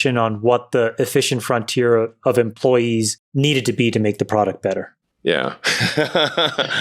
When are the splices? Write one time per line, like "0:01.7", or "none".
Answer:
0:03.2
0:05.0